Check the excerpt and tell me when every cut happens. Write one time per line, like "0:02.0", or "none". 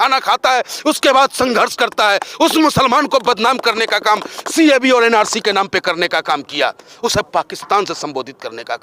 none